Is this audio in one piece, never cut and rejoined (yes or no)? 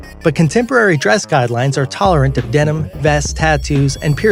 yes